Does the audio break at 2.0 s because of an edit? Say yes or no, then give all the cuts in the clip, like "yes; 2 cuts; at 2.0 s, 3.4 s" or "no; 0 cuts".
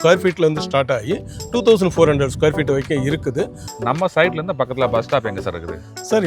no; 1 cut; at 3.6 s